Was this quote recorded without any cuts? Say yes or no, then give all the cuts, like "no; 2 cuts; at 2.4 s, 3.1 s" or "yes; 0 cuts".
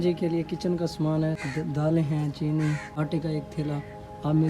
no; 2 cuts; at 1.4 s, 2.9 s